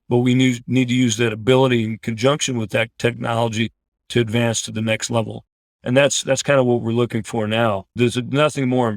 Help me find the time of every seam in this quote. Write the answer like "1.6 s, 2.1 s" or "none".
4.0 s, 7.9 s